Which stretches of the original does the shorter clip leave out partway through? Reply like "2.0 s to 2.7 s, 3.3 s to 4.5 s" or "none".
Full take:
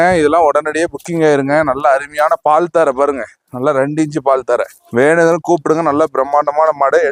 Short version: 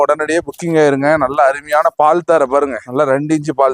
3.3 s to 3.5 s